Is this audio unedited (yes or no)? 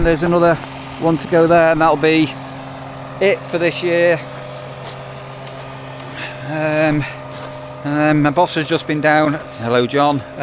yes